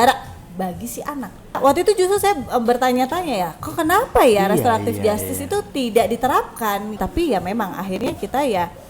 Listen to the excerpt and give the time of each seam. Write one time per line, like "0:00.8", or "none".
0:01.6
0:07.0